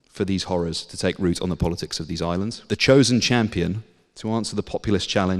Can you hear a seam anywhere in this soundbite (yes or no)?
yes